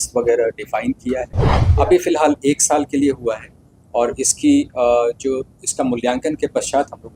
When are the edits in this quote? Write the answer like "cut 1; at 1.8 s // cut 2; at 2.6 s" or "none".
cut 1; at 1.6 s